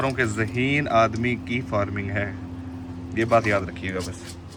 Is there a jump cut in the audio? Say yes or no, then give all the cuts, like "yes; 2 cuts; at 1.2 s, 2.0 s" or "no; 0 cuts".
no; 0 cuts